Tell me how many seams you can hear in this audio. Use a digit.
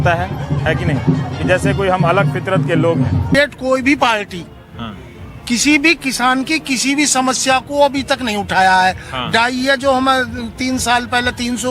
1